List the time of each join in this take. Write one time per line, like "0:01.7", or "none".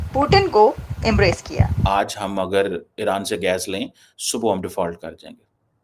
0:01.8